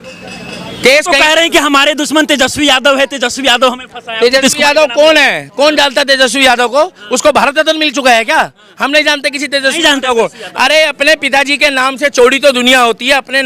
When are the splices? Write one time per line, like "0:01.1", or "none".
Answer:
none